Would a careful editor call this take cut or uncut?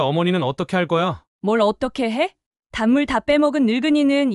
cut